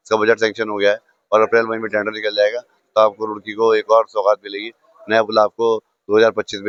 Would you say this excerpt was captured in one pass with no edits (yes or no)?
yes